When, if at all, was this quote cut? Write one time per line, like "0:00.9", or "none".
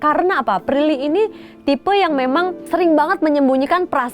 0:02.6

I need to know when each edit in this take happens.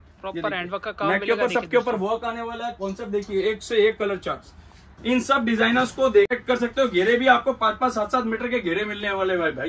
0:06.4

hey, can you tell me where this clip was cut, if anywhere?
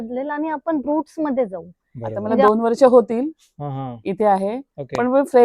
0:02.4

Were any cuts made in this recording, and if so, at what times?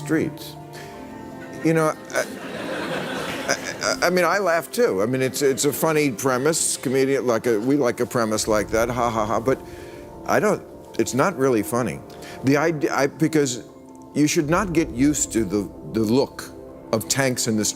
none

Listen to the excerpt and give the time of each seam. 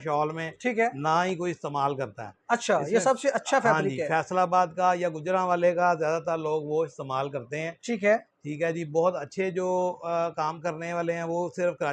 none

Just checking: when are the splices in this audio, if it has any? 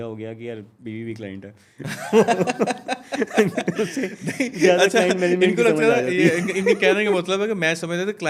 none

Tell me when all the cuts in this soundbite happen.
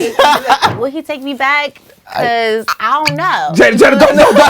0:00.7
0:03.5

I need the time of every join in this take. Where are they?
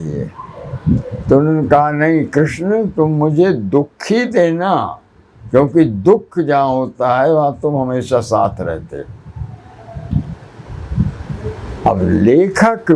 none

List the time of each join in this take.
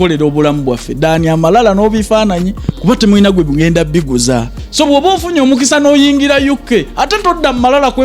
0:04.6

